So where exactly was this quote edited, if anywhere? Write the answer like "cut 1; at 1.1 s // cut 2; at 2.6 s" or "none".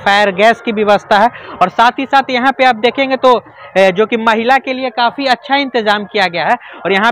none